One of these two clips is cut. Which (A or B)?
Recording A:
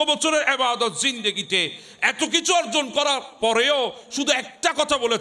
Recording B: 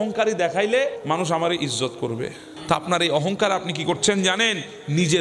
B